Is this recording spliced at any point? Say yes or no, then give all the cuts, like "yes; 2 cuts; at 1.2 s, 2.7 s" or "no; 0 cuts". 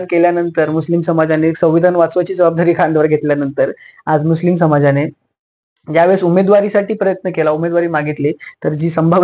no; 0 cuts